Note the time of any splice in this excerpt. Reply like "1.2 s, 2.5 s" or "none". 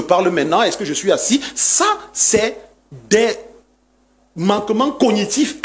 none